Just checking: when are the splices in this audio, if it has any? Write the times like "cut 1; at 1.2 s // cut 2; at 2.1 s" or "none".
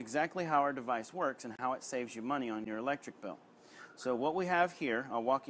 cut 1; at 1.5 s // cut 2; at 2.7 s